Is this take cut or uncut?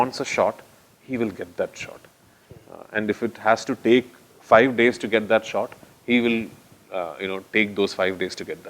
uncut